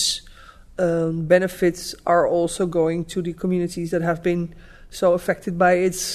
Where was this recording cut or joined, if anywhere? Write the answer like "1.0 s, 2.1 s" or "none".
none